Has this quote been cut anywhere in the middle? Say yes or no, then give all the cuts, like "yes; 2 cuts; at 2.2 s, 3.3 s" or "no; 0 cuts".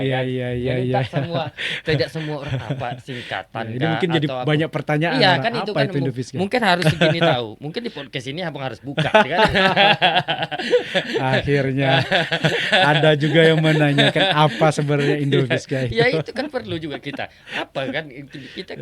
no; 0 cuts